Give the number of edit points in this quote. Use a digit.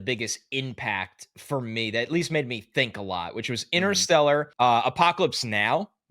1